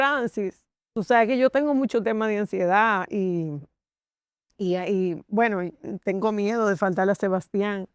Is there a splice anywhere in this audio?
no; 0 cuts

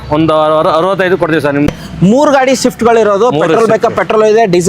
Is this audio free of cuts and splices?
no; 1 cut; at 1.7 s

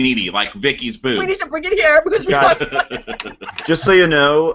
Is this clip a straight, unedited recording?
no; 1 cut; at 1.2 s

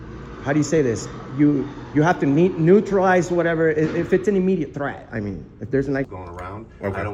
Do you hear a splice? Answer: yes; 1 cut; at 6.1 s

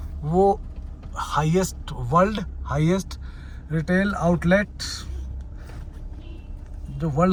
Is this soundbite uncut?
yes; 0 cuts

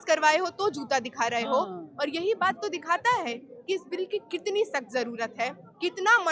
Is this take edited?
no; 0 cuts

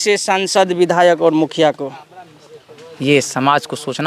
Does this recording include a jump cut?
no; 0 cuts

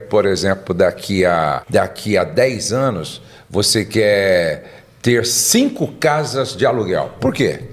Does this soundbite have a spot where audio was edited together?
yes; 1 cut; at 1.6 s

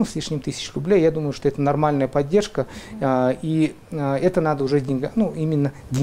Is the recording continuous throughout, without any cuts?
yes; 0 cuts

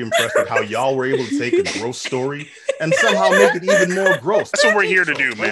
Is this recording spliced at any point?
yes; 1 cut; at 4.5 s

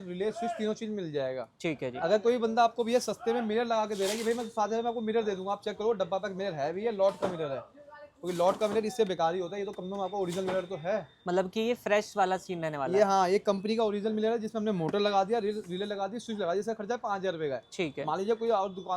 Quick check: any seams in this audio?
no; 0 cuts

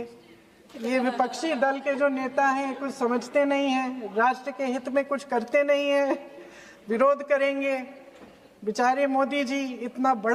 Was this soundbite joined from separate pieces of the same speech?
no; 0 cuts

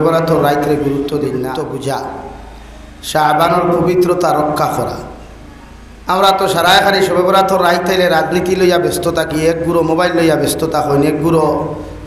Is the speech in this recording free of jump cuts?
no; 1 cut; at 1.6 s

